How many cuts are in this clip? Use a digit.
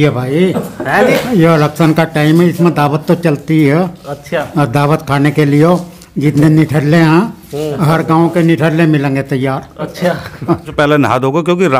1